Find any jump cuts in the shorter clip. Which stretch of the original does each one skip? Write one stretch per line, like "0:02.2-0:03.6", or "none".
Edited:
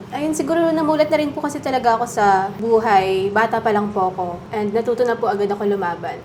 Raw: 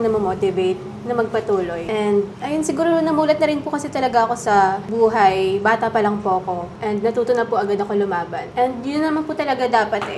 none